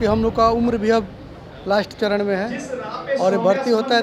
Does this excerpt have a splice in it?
no; 0 cuts

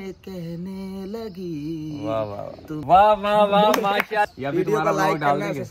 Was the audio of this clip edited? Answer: yes; 2 cuts; at 2.8 s, 4.3 s

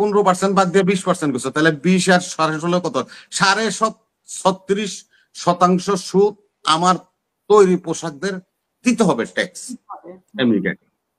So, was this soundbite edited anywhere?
no; 0 cuts

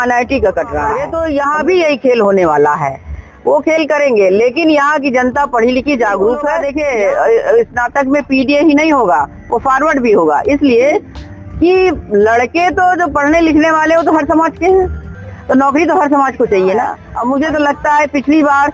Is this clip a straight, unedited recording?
no; 3 cuts; at 1.1 s, 6.7 s, 17.1 s

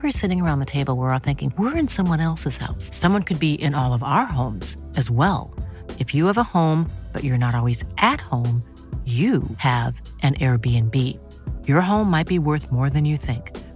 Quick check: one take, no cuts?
yes; 0 cuts

